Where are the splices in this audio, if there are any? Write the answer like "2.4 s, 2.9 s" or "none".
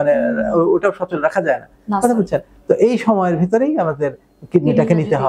none